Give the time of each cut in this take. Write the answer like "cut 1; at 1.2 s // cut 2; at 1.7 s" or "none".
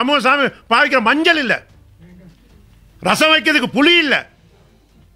none